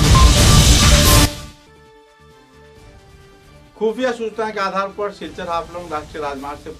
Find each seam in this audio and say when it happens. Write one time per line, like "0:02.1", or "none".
0:02.7